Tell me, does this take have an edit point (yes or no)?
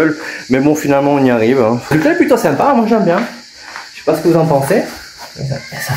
yes